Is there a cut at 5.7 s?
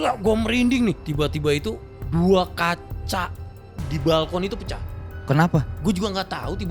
yes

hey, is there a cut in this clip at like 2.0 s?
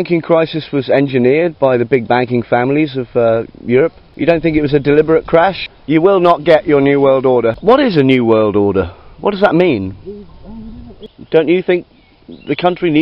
no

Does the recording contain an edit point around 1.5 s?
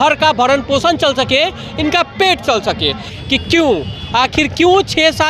no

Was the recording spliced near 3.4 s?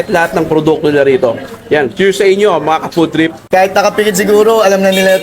yes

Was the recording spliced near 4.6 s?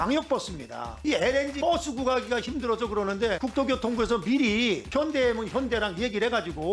no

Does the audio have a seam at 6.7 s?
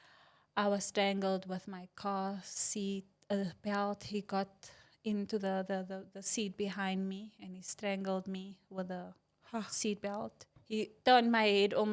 no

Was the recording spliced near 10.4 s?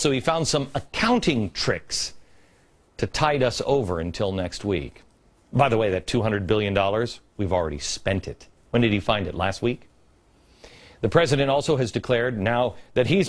no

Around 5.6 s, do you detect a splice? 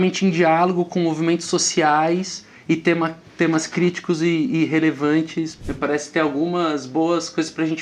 yes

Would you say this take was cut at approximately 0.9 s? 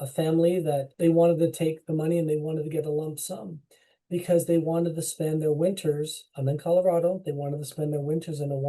yes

